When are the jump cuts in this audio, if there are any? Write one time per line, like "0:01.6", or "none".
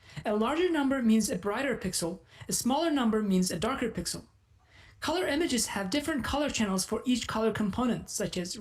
0:05.0